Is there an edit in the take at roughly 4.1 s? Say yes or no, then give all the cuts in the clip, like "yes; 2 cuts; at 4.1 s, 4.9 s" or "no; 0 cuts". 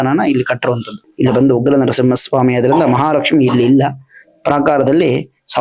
no; 1 cut; at 1.1 s